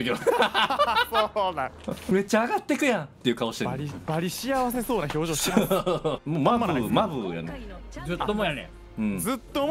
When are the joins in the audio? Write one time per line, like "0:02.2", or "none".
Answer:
0:02.0
0:06.2

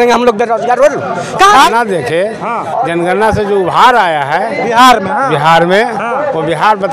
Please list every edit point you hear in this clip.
0:01.7

